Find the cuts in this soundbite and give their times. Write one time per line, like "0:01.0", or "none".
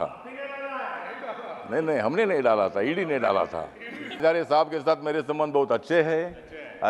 0:04.2